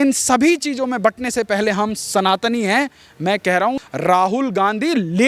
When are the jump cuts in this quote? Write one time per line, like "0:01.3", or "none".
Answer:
0:03.8

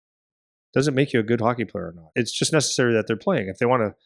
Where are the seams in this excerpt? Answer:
0:02.1

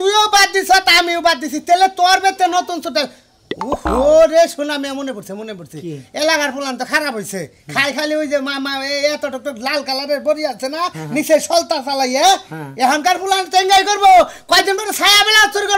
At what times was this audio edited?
none

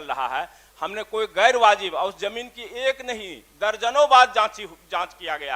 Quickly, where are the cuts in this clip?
none

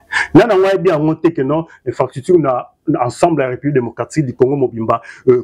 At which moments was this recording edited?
none

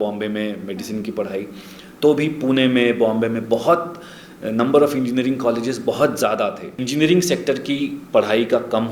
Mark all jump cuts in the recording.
0:06.8

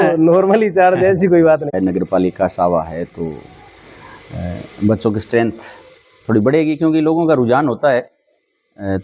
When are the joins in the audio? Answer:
0:01.7

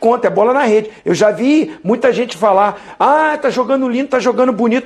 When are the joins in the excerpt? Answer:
none

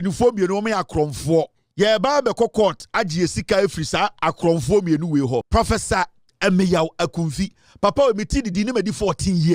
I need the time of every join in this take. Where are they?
0:01.6
0:05.5

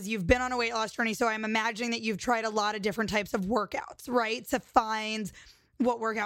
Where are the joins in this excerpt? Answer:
none

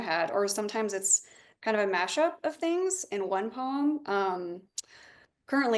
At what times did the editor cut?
none

